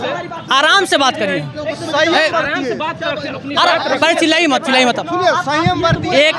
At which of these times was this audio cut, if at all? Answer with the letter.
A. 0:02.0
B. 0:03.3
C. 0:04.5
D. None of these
D